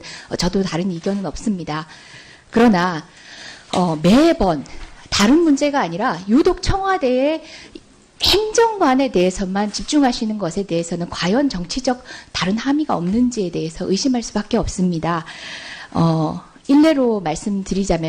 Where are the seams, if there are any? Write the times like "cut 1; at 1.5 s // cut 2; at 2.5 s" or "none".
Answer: cut 1; at 9.0 s